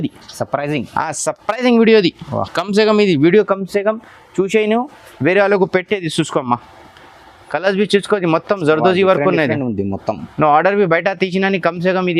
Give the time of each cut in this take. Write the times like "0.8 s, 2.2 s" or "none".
none